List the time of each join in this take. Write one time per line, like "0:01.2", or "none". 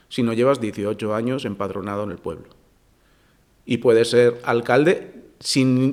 none